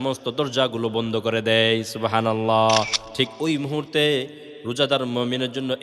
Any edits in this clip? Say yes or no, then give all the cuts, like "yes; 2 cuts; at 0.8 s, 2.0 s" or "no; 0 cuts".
yes; 1 cut; at 3.0 s